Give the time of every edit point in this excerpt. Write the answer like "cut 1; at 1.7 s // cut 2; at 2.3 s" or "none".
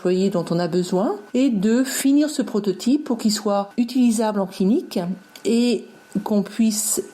cut 1; at 1.2 s // cut 2; at 3.7 s